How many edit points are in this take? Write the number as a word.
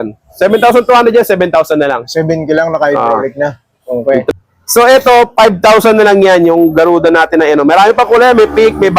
one